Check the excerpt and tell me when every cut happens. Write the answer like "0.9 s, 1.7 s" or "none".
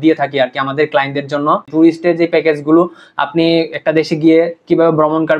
1.7 s